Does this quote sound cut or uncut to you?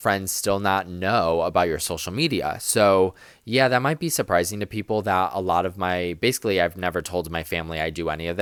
uncut